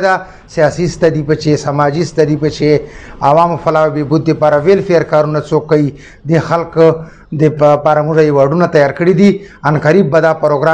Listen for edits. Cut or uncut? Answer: uncut